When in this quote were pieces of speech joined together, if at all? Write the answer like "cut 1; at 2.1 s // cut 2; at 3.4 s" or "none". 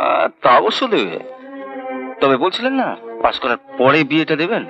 none